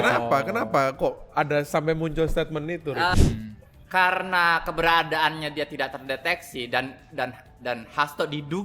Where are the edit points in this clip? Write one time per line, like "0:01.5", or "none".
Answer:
0:03.1

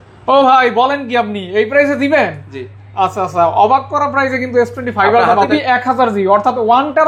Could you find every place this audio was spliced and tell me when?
0:05.5

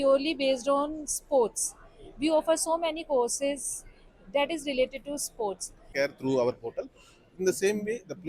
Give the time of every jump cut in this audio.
0:05.9

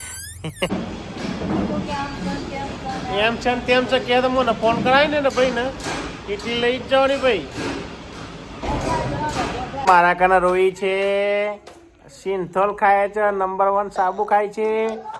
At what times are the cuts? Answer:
0:00.7
0:09.8

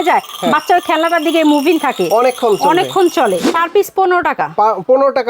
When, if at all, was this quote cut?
0:03.5

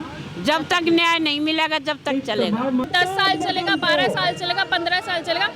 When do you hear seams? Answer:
0:02.8

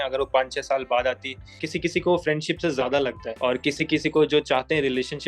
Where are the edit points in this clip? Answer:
0:01.5
0:03.3

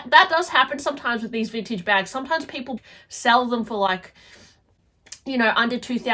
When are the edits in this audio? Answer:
0:02.9

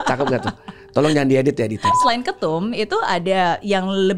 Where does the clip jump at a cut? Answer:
0:02.0

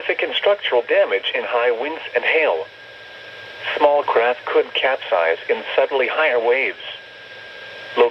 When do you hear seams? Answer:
none

